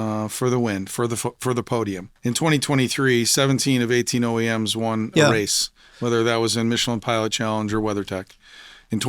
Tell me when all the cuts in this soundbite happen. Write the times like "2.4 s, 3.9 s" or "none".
2.1 s